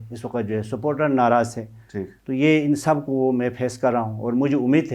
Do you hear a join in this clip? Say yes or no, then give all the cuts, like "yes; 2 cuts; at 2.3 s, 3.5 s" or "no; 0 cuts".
no; 0 cuts